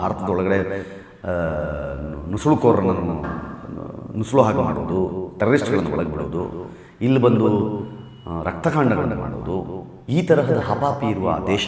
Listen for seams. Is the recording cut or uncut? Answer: uncut